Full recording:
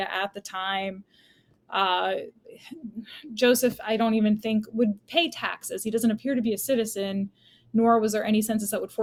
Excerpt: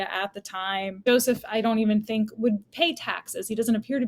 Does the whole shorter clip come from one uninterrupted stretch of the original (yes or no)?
no